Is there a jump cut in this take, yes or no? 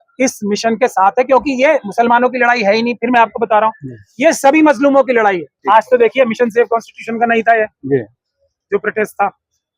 yes